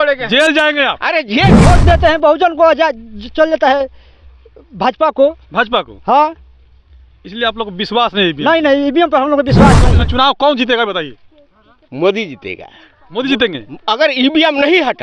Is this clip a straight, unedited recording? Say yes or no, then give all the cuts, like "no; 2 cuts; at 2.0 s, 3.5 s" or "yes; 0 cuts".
no; 2 cuts; at 1.6 s, 10.0 s